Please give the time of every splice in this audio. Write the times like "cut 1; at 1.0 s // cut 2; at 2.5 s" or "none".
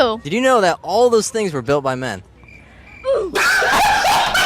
none